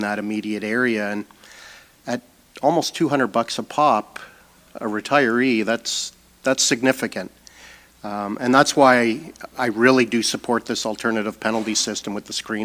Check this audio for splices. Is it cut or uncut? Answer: uncut